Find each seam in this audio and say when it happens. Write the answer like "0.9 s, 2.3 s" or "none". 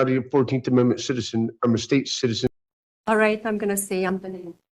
2.4 s